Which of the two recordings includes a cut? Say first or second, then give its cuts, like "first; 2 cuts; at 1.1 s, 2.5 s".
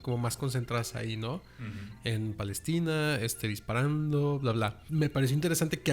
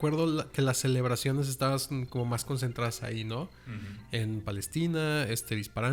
first; 1 cut; at 4.8 s